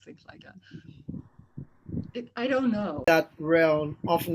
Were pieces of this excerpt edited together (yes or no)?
yes